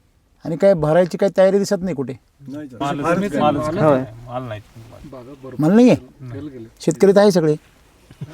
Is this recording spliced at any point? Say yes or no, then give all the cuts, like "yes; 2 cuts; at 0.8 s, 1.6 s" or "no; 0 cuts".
yes; 1 cut; at 2.8 s